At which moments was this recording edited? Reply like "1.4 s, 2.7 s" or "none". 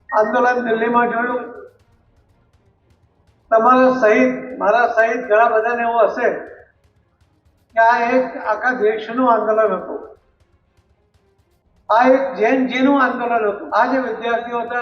13.6 s